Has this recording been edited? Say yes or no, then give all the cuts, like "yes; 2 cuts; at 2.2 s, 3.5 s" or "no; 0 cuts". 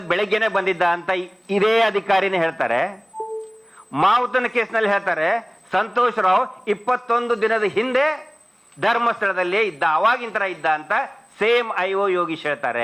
no; 0 cuts